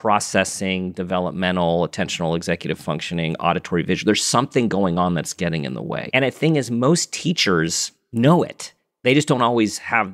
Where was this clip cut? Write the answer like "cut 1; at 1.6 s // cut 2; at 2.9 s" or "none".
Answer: cut 1; at 6.0 s